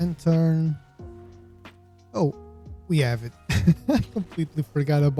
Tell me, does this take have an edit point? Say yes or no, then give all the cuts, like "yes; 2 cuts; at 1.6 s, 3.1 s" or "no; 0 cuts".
no; 0 cuts